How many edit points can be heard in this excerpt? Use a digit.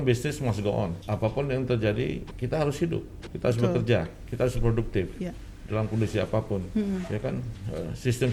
4